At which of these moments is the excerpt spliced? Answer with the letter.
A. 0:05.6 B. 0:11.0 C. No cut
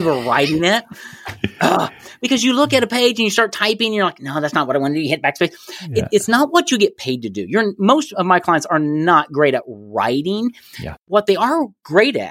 B